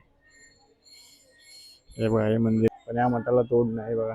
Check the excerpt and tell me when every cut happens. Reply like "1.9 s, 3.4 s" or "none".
2.7 s

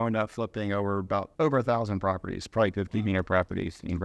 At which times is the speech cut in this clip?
1.3 s

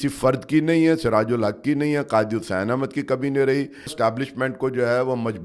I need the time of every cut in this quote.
3.9 s

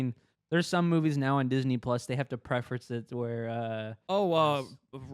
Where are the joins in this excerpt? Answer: 4.1 s

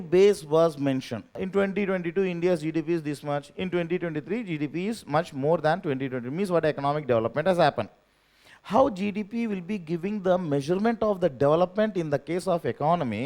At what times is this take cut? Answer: 1.4 s

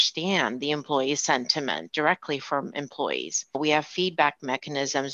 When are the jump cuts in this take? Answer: 1.9 s, 3.4 s

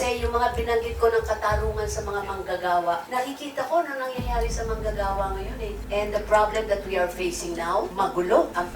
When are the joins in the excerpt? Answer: 5.8 s

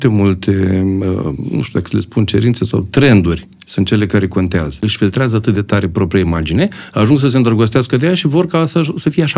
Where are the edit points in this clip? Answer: 4.8 s

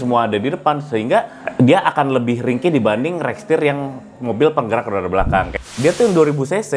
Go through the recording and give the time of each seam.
1.4 s, 5.6 s

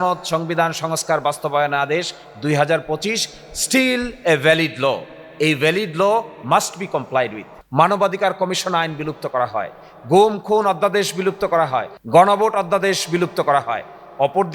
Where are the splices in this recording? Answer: 7.6 s, 12.0 s

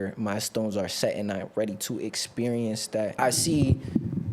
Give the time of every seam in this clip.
3.2 s

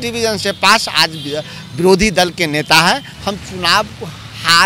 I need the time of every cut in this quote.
3.1 s

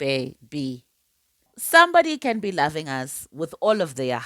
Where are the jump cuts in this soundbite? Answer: 1.5 s

